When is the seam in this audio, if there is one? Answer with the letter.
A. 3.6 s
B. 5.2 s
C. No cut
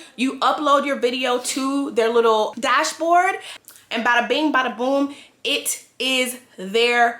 A